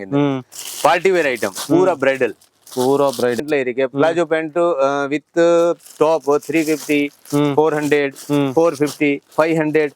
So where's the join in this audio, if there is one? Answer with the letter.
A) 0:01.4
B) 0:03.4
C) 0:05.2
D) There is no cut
B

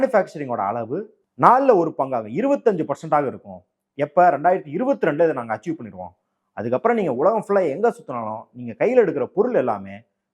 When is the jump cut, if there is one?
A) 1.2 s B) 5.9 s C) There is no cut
A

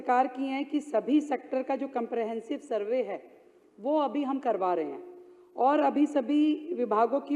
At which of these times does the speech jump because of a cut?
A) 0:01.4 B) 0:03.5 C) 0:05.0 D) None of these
D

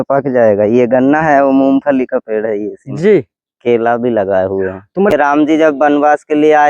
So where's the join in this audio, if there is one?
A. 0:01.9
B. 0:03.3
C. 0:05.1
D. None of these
C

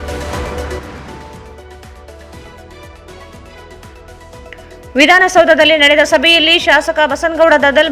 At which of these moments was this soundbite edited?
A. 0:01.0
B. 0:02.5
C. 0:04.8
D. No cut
A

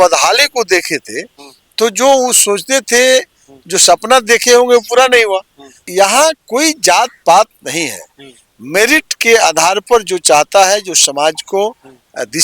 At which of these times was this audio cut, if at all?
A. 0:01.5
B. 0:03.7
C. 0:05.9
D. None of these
C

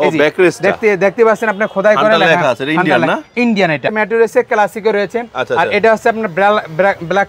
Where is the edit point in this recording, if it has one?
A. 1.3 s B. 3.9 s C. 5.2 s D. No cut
B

